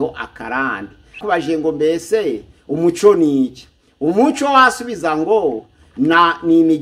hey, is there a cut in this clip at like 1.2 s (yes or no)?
yes